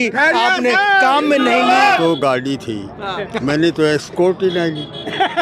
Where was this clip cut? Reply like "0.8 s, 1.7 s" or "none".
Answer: 2.0 s